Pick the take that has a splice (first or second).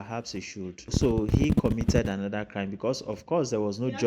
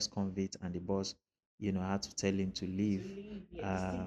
first